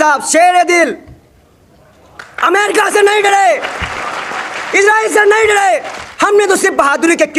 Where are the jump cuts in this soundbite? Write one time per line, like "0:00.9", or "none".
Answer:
0:06.0